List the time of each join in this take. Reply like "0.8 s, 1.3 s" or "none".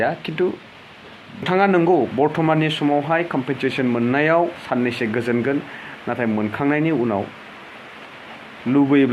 1.5 s